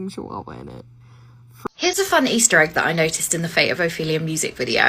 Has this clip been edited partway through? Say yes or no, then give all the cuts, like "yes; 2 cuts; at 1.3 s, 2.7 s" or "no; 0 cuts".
yes; 1 cut; at 1.5 s